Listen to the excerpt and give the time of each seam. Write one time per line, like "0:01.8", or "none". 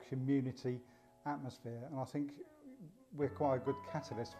none